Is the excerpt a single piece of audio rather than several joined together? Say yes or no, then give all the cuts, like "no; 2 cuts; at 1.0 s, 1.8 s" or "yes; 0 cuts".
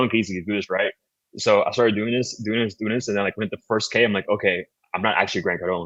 yes; 0 cuts